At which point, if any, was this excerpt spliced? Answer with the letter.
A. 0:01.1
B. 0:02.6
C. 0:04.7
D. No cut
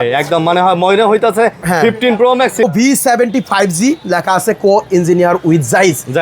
B